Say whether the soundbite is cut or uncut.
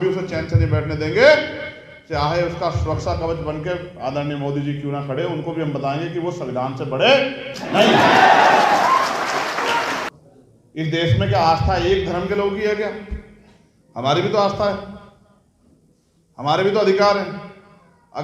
cut